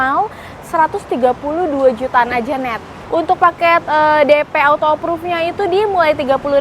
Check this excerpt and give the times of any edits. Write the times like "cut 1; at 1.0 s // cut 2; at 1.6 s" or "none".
cut 1; at 2.9 s